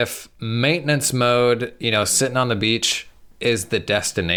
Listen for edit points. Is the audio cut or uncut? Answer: uncut